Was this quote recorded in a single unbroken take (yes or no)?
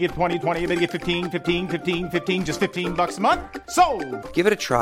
yes